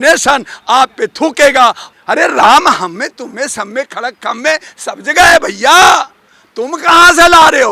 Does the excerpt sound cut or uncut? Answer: cut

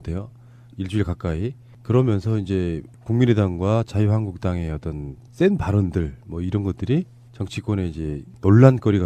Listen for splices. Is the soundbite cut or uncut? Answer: uncut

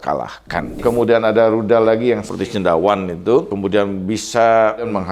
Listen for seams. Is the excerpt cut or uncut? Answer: cut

